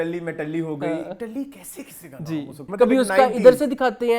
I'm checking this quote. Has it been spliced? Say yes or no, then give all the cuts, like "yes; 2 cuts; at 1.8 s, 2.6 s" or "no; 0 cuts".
yes; 1 cut; at 2.6 s